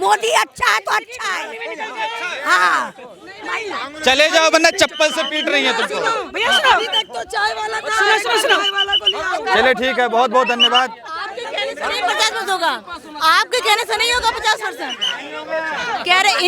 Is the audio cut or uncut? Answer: uncut